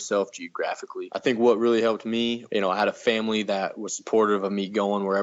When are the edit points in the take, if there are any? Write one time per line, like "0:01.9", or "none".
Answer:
0:01.0
0:02.4